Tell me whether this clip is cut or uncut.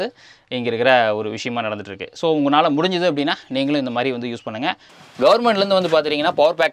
cut